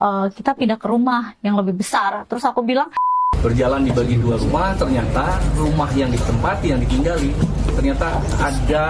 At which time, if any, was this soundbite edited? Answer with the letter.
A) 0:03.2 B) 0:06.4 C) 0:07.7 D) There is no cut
A